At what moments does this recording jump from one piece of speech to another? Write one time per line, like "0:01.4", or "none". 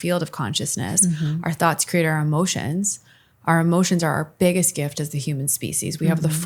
none